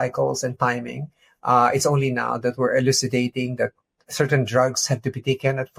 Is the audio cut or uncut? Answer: uncut